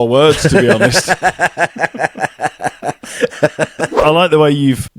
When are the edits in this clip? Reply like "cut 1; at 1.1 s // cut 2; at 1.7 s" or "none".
cut 1; at 3.9 s

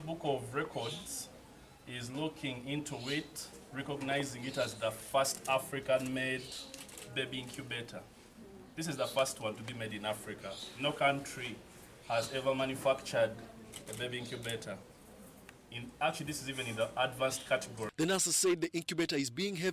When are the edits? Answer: cut 1; at 17.9 s

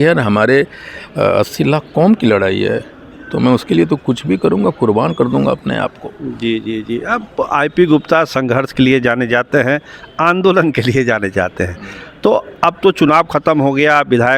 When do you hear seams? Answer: none

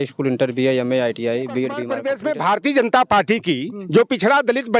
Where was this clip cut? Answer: cut 1; at 2.0 s

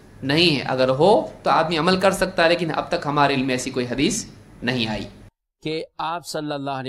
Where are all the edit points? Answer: cut 1; at 5.3 s

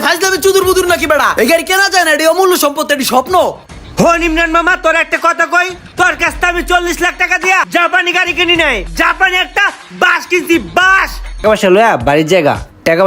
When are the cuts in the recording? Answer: cut 1; at 8.9 s // cut 2; at 11.4 s

